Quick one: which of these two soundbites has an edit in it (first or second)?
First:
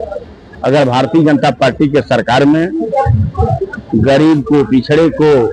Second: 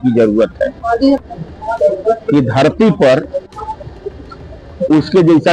second